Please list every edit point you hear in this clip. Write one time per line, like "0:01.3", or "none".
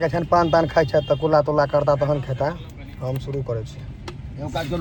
none